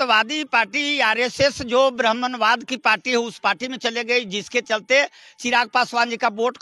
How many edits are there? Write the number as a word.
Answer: zero